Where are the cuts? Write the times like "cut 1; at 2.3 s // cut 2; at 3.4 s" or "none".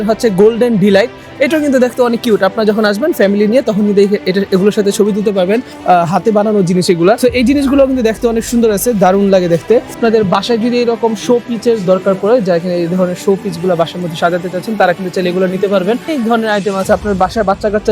cut 1; at 5.7 s // cut 2; at 7.2 s // cut 3; at 10.0 s // cut 4; at 16.1 s